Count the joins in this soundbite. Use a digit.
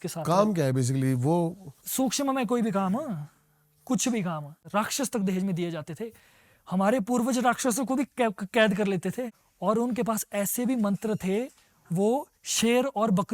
2